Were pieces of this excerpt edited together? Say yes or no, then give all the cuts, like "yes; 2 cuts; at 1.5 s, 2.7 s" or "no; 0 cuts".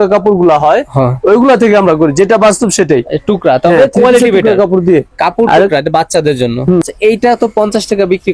no; 0 cuts